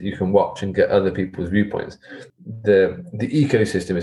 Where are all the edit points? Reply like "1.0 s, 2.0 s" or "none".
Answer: 1.9 s